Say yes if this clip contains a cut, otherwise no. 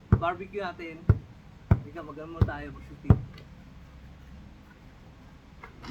no